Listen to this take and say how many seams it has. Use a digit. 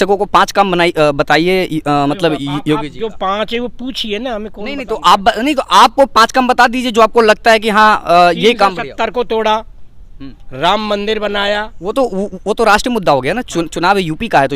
0